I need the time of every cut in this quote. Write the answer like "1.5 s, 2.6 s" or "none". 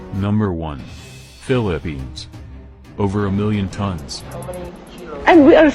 none